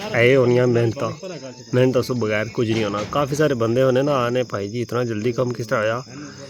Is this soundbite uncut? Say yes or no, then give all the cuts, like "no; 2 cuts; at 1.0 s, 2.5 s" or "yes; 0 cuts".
yes; 0 cuts